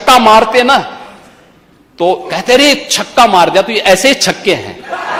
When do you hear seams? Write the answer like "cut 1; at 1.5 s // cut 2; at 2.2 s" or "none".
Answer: none

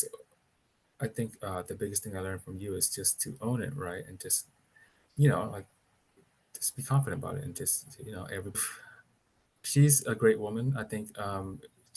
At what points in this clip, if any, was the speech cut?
cut 1; at 8.6 s

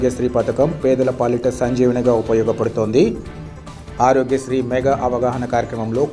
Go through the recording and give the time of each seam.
none

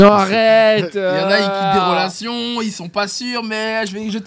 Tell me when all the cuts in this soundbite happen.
none

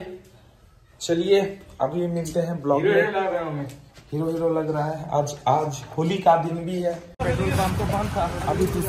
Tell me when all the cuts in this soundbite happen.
cut 1; at 7.1 s

